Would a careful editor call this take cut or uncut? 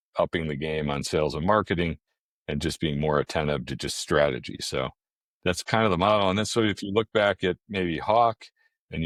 uncut